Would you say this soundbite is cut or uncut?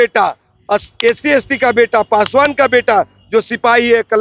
uncut